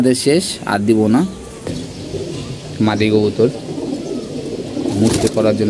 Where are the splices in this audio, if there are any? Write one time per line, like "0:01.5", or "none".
0:01.7